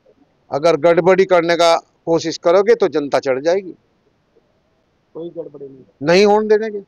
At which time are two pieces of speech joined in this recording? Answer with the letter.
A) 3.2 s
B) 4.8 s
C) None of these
C